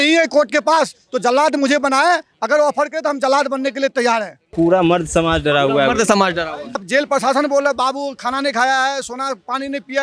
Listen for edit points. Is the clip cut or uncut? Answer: cut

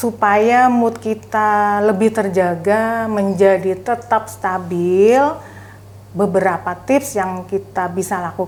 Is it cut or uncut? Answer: uncut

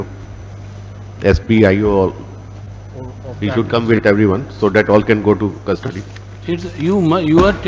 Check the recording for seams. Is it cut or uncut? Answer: uncut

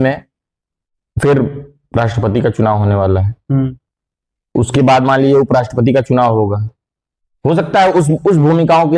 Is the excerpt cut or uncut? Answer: uncut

